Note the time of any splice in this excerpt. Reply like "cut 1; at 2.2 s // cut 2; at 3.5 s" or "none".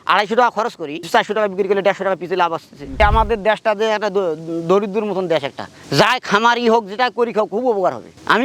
cut 1; at 0.9 s // cut 2; at 3.0 s